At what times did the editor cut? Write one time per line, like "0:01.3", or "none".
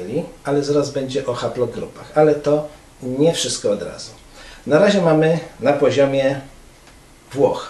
none